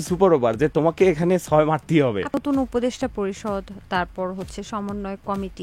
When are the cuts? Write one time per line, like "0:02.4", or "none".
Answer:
0:02.4